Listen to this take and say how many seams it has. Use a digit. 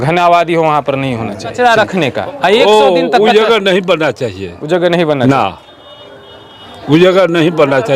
1